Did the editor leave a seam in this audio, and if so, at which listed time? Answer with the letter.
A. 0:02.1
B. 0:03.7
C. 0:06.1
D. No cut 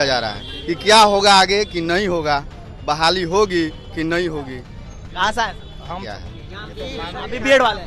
C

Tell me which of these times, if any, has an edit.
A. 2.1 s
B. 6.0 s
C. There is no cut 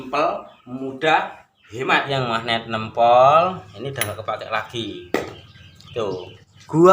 A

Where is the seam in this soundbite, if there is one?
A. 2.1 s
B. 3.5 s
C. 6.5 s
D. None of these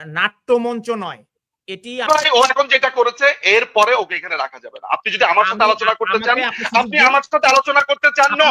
A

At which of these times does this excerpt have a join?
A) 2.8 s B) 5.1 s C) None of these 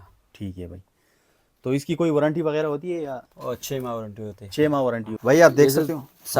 B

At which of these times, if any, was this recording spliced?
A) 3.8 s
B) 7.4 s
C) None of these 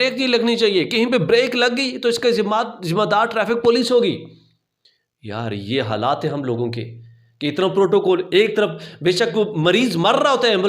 C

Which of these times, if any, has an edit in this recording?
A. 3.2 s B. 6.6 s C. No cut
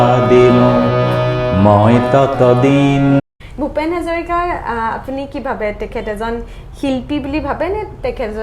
A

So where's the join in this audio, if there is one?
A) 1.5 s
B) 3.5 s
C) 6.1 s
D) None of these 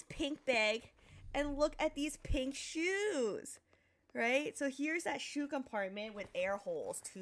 D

